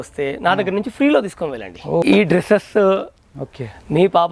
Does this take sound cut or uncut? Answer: cut